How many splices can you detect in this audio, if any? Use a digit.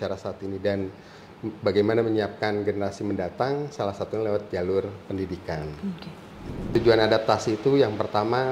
1